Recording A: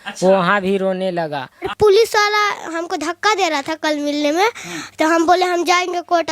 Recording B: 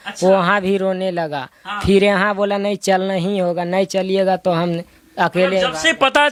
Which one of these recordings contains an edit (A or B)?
A